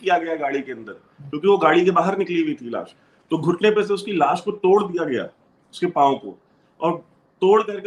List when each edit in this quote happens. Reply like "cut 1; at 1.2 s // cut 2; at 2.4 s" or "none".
none